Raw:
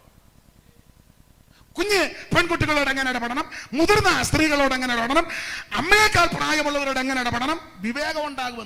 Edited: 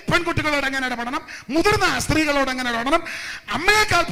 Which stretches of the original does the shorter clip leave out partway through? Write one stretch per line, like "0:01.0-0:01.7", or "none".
none